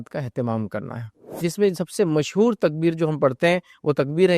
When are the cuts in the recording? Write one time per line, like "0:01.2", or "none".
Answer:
0:01.3